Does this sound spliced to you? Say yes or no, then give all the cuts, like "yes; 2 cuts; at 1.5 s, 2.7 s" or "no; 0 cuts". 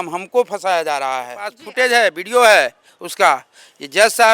yes; 1 cut; at 1.6 s